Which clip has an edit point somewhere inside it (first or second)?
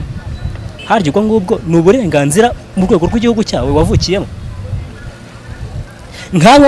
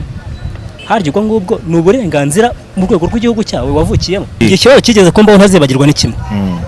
second